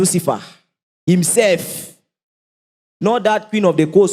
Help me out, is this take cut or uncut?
uncut